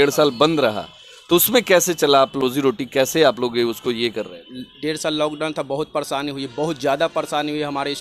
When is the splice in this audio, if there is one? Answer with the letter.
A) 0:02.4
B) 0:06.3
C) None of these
A